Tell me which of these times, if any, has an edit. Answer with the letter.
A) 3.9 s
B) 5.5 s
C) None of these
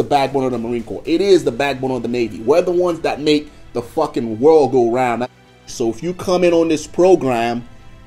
B